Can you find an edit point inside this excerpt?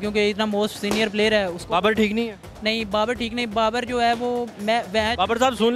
no; 0 cuts

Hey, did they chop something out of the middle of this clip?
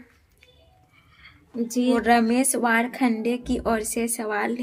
yes; 1 cut; at 1.9 s

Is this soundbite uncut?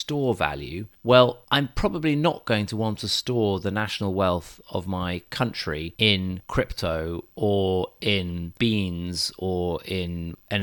yes; 0 cuts

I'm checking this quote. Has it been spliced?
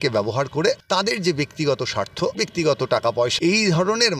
yes; 3 cuts; at 0.8 s, 2.3 s, 3.3 s

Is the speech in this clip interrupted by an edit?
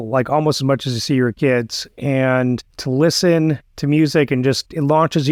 no; 0 cuts

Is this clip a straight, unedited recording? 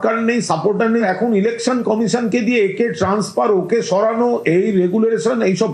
yes; 0 cuts

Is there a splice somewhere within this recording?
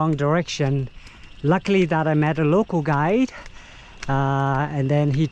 no; 0 cuts

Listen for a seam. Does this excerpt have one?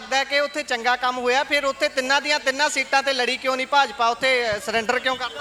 no; 0 cuts

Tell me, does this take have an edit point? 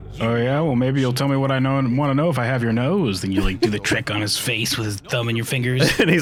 no; 0 cuts

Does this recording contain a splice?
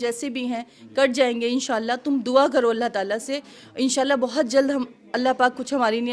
no; 0 cuts

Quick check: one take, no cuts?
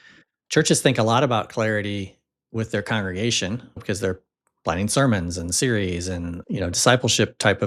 yes; 0 cuts

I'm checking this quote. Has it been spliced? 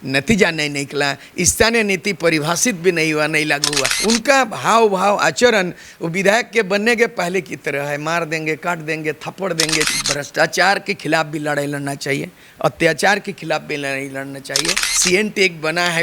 yes; 3 cuts; at 3.9 s, 9.9 s, 14.9 s

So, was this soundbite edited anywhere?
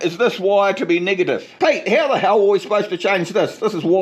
yes; 1 cut; at 1.5 s

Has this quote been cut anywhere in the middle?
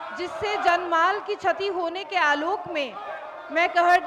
no; 0 cuts

